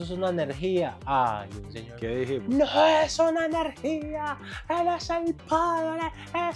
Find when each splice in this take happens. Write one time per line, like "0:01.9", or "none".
none